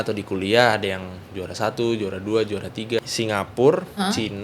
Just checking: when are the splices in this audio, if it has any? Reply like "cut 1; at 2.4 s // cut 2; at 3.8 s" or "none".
cut 1; at 3.0 s